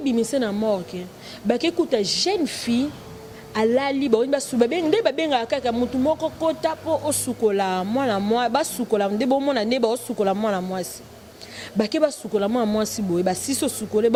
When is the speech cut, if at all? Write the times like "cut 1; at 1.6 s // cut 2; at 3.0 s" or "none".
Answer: none